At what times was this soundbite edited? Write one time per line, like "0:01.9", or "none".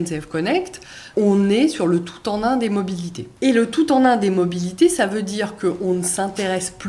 0:01.0
0:03.2